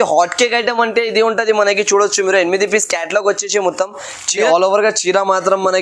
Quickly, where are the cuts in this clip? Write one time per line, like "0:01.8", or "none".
0:04.3